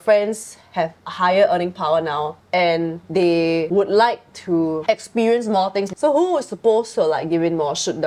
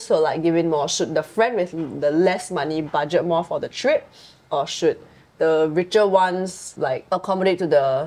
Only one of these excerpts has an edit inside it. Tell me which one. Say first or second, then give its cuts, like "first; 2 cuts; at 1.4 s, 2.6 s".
first; 4 cuts; at 1.0 s, 2.4 s, 3.5 s, 5.9 s